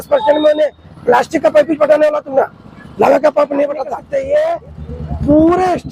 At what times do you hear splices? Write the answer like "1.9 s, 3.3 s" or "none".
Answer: 4.0 s